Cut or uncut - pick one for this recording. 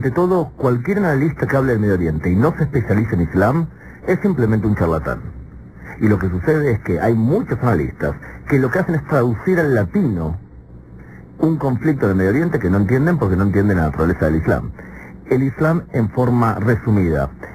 cut